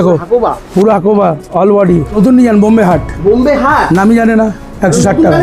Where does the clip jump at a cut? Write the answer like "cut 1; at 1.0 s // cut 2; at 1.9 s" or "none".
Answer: cut 1; at 2.2 s